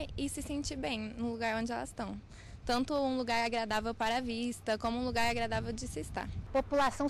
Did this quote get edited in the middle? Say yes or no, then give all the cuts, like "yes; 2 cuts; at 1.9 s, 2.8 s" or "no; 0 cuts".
no; 0 cuts